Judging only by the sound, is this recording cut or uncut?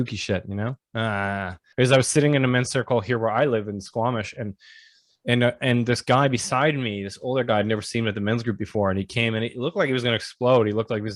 cut